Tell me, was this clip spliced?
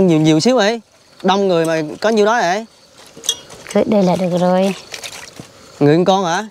no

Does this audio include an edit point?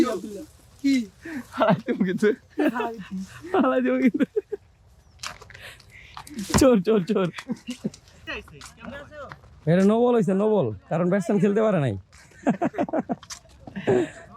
yes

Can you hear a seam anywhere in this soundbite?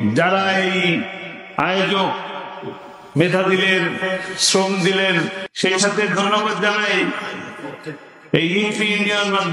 yes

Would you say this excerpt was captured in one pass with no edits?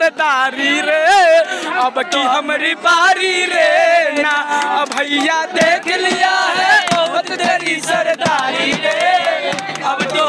yes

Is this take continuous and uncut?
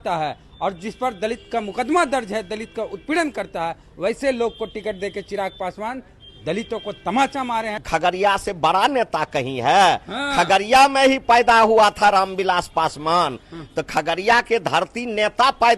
no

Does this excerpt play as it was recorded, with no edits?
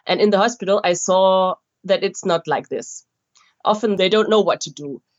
no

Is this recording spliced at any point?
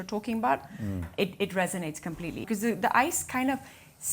yes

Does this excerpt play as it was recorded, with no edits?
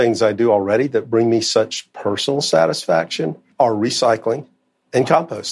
no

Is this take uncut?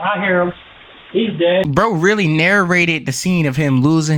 no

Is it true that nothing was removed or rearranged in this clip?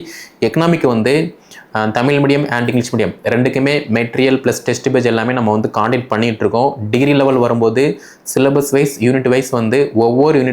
yes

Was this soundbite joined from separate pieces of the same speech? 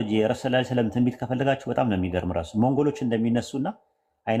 no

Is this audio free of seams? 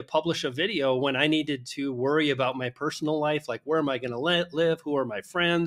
yes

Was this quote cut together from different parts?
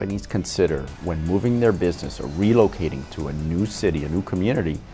no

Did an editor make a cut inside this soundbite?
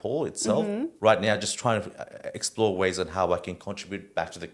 yes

